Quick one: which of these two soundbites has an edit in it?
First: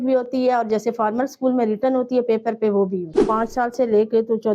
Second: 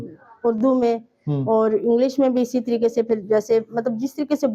first; 1 cut; at 3.2 s

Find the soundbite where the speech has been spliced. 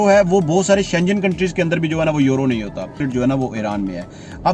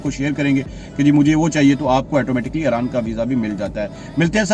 first; 1 cut; at 3.0 s

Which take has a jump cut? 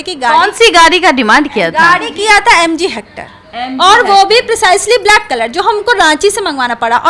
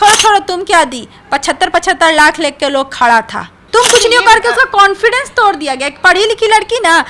second; 1 cut; at 3.5 s

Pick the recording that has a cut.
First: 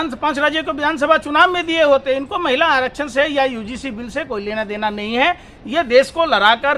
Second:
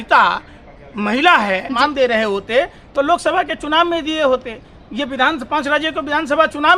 second; 1 cut; at 1.7 s

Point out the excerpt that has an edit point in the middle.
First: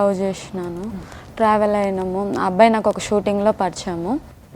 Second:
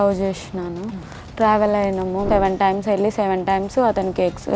second; 1 cut; at 2.2 s

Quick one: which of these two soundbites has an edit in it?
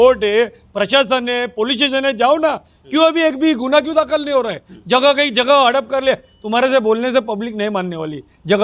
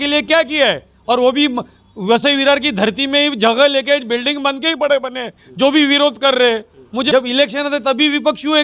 second; 1 cut; at 7.1 s

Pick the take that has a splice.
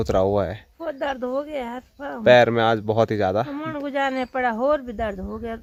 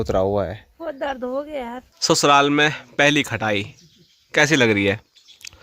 second; 1 cut; at 1.9 s

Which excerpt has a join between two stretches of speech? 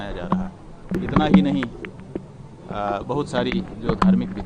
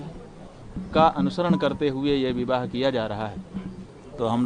first; 1 cut; at 0.9 s

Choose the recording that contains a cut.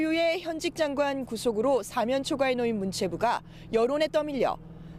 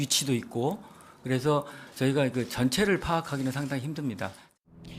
second; 1 cut; at 2.7 s

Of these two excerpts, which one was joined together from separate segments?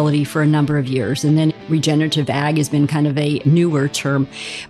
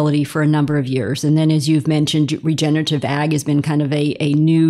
first; 2 cuts; at 1.6 s, 3.4 s

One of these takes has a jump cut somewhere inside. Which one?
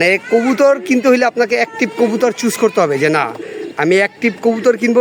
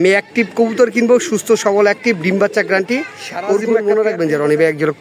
second; 1 cut; at 3.6 s

